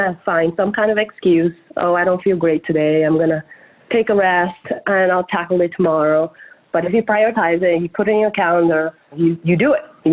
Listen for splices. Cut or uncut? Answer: cut